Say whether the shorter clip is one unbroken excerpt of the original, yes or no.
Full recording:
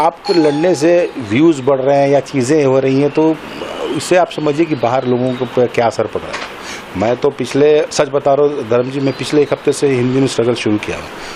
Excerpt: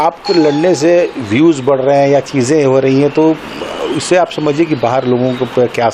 yes